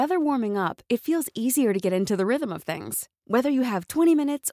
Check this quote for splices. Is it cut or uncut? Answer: uncut